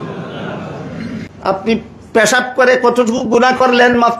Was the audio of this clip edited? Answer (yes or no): yes